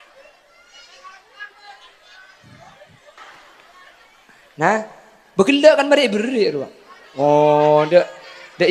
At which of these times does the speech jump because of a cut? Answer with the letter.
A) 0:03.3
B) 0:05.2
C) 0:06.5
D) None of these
A